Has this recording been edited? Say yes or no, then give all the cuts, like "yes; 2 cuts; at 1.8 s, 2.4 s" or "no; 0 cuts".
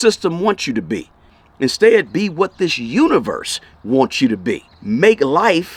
no; 0 cuts